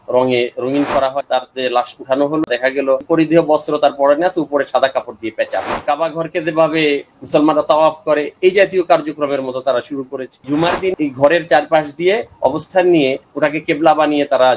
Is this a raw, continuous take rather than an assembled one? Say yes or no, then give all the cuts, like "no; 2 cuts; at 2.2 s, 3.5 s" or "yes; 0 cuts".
no; 4 cuts; at 1.2 s, 2.9 s, 5.8 s, 10.6 s